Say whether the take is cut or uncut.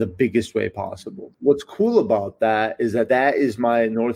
cut